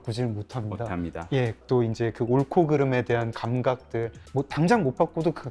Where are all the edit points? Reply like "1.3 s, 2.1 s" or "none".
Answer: 1.6 s, 4.2 s